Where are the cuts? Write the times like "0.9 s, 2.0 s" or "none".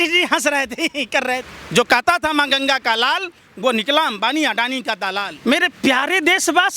1.6 s, 5.3 s